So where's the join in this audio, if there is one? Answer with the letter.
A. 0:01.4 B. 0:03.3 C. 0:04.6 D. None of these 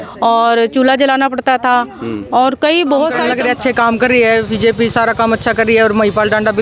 B